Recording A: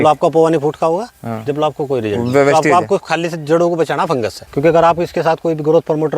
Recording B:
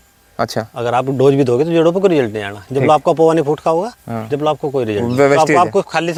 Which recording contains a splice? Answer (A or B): A